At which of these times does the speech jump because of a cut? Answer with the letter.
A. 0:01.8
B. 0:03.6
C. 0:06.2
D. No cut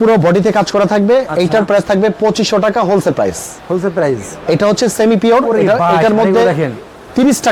D